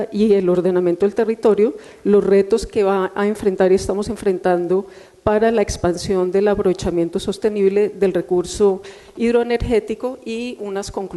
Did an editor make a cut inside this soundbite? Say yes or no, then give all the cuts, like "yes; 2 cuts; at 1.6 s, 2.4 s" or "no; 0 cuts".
yes; 1 cut; at 2.6 s